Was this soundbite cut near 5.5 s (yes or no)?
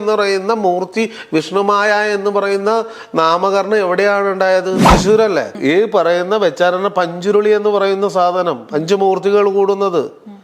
yes